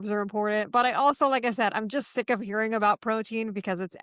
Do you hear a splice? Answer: no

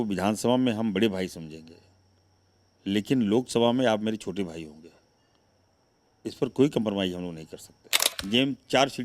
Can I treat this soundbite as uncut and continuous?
no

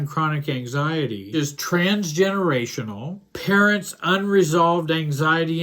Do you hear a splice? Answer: yes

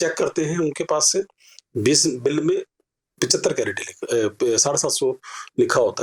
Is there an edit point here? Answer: no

